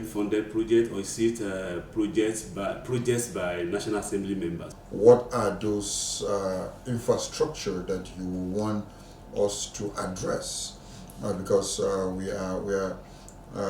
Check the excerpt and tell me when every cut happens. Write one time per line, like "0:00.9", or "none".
0:04.7